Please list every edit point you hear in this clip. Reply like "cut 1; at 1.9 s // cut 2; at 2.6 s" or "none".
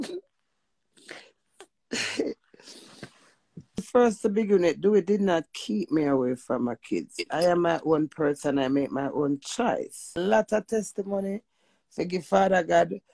cut 1; at 3.9 s // cut 2; at 10.1 s